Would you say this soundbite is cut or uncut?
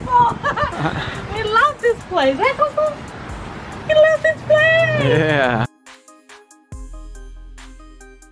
cut